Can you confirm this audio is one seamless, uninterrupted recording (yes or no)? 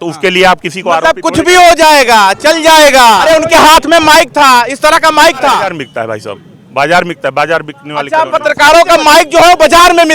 no